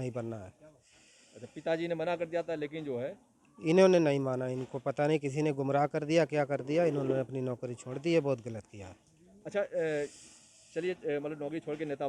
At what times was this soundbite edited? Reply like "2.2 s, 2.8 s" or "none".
none